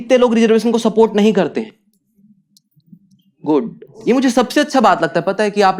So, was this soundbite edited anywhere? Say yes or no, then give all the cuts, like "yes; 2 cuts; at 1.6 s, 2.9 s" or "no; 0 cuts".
yes; 2 cuts; at 1.7 s, 3.8 s